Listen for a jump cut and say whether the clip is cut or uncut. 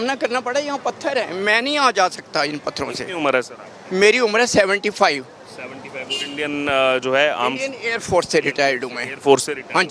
uncut